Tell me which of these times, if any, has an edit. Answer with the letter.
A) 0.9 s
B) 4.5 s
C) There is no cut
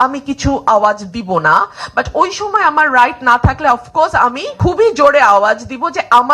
B